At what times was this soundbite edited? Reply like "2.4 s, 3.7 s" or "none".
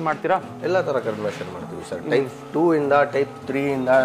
none